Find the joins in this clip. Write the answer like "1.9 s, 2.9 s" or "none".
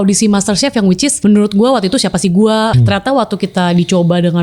1.1 s, 2.7 s